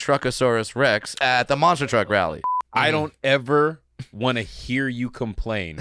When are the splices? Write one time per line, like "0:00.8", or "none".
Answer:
0:01.1
0:02.4